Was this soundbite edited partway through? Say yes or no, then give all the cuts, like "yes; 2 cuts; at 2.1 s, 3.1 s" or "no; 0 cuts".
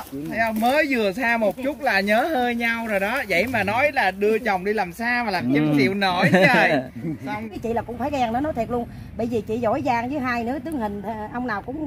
yes; 1 cut; at 7.5 s